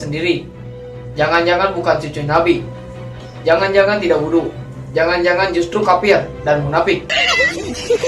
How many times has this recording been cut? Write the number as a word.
one